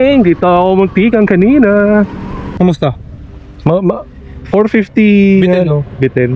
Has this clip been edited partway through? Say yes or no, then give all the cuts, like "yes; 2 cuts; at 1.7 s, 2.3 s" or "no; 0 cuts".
yes; 1 cut; at 2.4 s